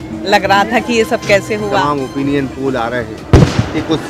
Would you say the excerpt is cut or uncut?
cut